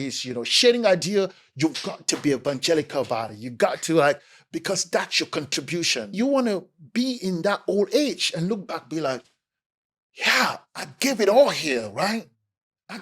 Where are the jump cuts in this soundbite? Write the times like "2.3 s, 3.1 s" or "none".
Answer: 6.1 s